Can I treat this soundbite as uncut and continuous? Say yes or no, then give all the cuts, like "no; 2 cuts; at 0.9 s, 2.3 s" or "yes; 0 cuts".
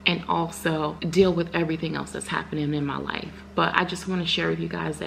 no; 1 cut; at 1.0 s